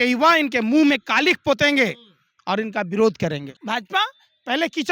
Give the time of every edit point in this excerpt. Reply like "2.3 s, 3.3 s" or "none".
3.5 s